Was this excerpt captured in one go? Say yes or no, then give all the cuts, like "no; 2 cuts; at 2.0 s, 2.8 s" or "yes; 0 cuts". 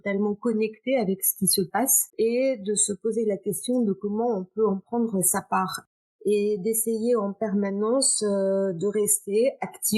no; 2 cuts; at 2.1 s, 5.8 s